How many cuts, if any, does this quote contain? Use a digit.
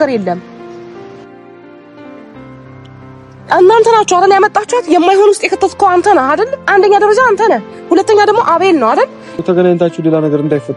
1